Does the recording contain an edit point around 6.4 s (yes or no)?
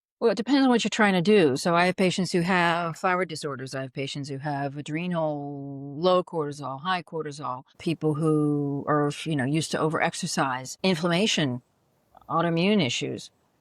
no